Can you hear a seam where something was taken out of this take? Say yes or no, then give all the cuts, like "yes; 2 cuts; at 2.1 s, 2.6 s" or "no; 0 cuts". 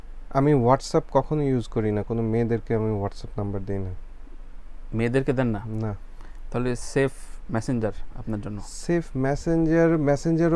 no; 0 cuts